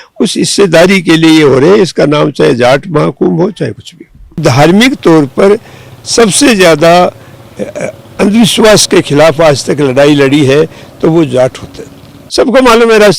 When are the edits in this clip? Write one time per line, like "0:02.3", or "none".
0:04.3
0:12.2